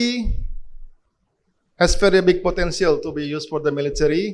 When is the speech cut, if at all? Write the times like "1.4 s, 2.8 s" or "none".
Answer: none